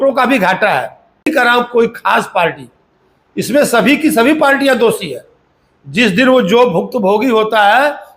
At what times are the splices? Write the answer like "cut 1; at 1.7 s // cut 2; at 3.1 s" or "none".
cut 1; at 1.3 s